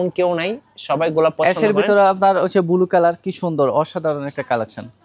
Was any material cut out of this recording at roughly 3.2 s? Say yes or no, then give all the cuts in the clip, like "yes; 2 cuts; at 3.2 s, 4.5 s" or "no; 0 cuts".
no; 0 cuts